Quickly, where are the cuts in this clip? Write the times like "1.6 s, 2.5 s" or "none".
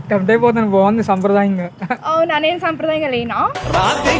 none